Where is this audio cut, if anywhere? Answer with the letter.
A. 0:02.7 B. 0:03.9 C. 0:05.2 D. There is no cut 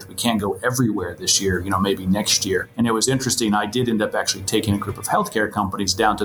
A